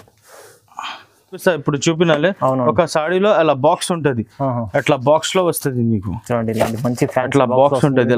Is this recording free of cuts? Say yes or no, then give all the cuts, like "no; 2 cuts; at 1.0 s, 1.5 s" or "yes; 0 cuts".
no; 1 cut; at 1.4 s